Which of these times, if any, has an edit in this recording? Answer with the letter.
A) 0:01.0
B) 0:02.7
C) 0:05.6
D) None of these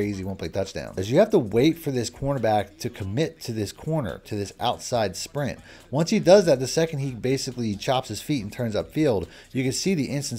A